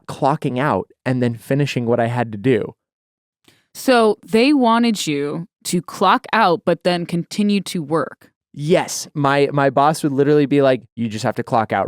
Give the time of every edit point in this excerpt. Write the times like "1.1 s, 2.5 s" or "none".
9.1 s, 10.9 s